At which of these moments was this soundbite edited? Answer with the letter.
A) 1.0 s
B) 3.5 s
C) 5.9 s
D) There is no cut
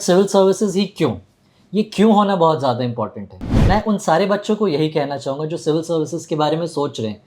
B